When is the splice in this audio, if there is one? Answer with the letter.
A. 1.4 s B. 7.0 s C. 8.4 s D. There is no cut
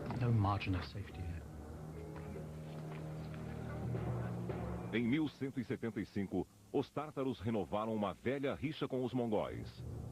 C